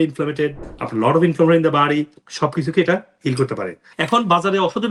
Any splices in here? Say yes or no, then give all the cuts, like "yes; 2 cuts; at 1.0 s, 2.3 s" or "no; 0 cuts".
yes; 1 cut; at 3.9 s